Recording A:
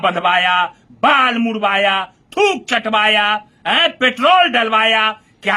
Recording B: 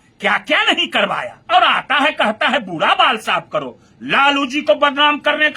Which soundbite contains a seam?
B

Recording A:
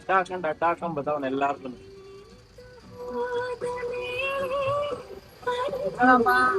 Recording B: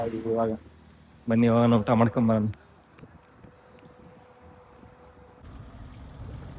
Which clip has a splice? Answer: B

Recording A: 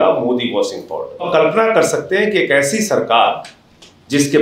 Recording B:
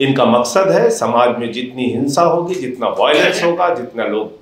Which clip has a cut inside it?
A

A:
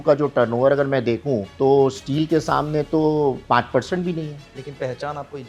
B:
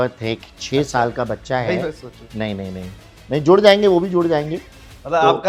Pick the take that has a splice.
A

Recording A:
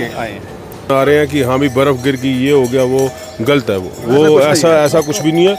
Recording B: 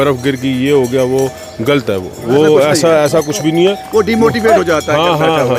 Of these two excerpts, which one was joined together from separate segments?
A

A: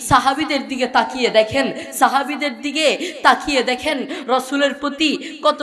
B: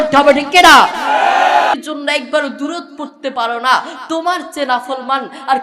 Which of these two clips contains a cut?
B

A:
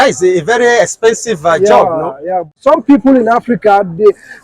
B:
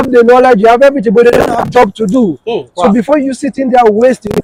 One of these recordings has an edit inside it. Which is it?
A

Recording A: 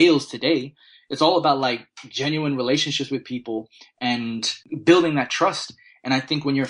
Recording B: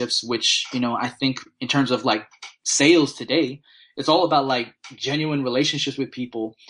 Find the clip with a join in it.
A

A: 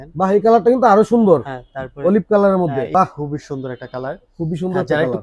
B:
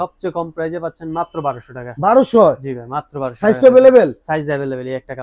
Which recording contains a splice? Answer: A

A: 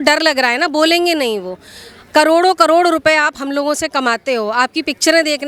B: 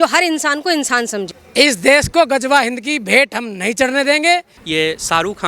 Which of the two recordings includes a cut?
B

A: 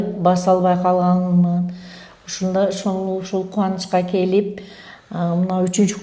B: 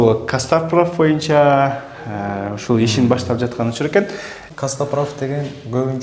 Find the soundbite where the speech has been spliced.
B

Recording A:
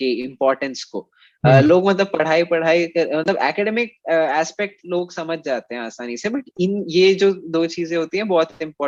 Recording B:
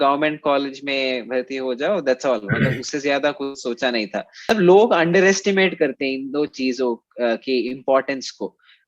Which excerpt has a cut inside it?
B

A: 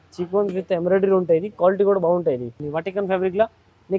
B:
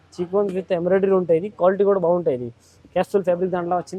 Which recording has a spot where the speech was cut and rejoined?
A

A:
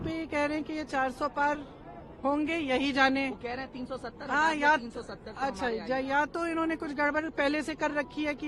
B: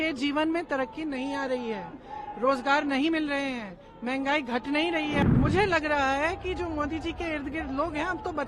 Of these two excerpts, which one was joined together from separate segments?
B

